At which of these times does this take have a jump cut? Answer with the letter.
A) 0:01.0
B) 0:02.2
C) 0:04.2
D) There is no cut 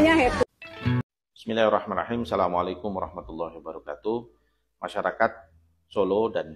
A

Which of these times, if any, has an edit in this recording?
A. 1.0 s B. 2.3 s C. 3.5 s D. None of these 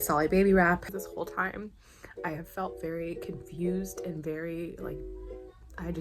A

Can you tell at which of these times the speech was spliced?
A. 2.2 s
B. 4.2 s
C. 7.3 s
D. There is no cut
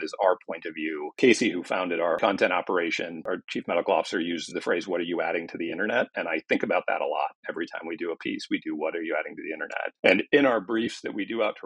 A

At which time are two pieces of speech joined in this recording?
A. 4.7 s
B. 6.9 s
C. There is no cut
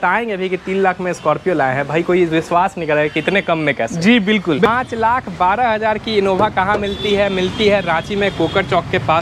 A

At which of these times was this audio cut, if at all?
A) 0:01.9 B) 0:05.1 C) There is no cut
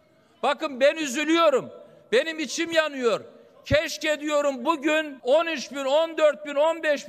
B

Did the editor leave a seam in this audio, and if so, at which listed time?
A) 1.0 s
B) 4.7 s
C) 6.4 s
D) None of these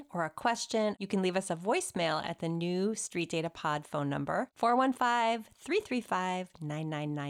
A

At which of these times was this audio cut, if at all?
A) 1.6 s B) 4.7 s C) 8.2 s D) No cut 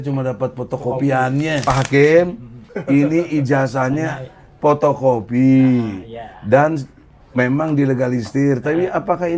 A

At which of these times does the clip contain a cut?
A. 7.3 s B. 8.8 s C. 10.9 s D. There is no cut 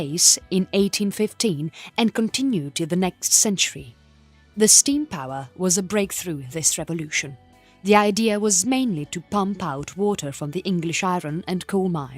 A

